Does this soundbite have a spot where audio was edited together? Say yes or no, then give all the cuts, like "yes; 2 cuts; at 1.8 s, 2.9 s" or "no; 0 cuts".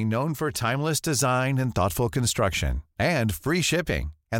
no; 0 cuts